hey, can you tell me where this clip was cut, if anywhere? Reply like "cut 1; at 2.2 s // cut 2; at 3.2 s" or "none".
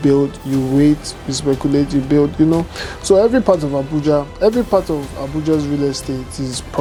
none